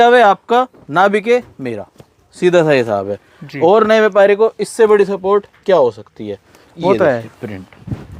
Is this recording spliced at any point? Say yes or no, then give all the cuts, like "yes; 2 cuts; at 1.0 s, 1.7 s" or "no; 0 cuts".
no; 0 cuts